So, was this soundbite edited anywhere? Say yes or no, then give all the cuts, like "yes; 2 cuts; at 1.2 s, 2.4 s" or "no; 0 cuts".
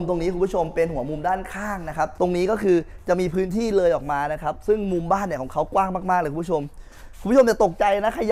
yes; 1 cut; at 2.1 s